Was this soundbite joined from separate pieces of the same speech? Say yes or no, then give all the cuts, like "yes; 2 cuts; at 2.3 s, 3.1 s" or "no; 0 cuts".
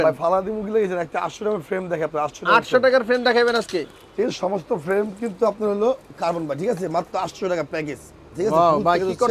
no; 0 cuts